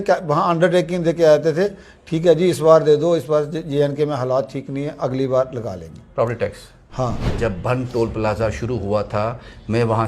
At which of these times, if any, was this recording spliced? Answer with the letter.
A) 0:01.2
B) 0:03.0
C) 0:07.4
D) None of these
C